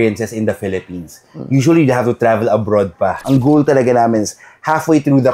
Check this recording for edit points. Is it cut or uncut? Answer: cut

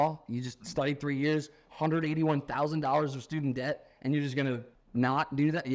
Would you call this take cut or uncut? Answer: uncut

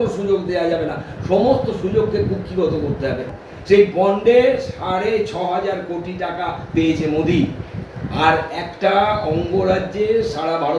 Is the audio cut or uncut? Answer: cut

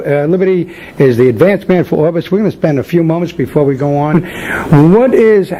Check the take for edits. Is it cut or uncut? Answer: uncut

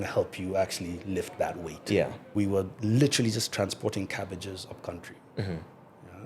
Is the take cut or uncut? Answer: cut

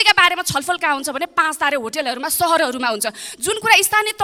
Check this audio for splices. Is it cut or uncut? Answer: uncut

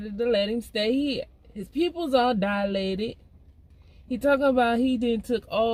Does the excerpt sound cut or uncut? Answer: uncut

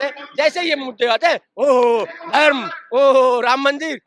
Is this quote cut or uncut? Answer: uncut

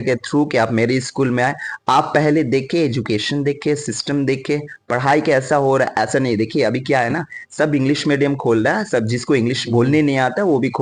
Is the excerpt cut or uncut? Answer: uncut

